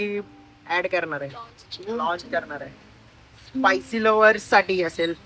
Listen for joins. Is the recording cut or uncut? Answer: uncut